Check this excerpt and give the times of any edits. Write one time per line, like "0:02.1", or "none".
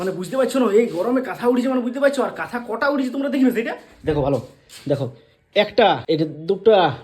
none